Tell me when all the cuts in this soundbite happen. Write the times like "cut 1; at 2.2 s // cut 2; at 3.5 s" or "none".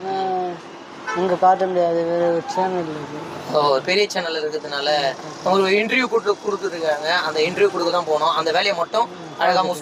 none